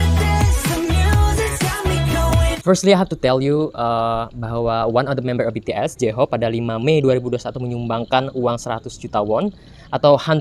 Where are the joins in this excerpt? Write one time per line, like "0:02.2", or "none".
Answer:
0:02.6